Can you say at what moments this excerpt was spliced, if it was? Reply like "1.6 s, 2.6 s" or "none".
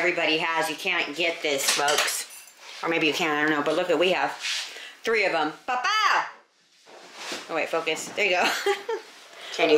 none